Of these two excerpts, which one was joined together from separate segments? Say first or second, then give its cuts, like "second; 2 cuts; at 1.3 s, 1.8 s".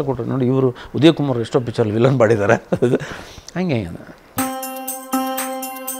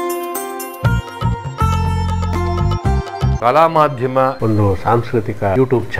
first; 1 cut; at 4.3 s